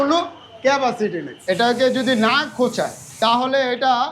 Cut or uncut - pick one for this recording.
cut